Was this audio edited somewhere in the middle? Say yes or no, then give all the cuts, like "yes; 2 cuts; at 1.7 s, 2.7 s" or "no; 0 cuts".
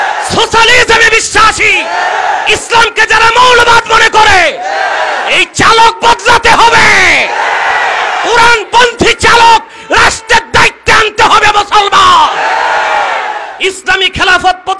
yes; 1 cut; at 13.5 s